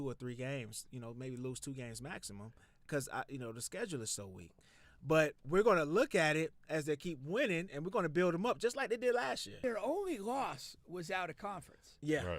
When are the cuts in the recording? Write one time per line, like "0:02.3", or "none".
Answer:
0:09.6